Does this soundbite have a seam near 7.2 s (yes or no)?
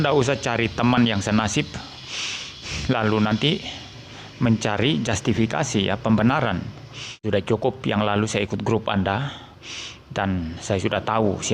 yes